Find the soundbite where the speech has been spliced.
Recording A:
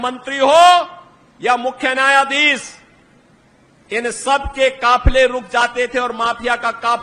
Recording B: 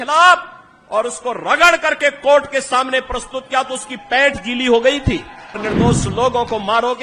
B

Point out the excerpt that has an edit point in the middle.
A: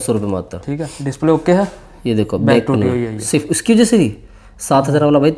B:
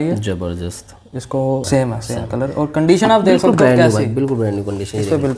B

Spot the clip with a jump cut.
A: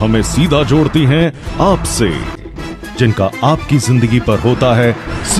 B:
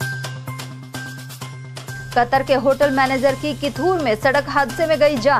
B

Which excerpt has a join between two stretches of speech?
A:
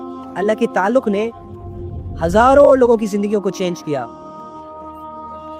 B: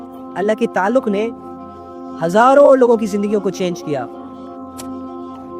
A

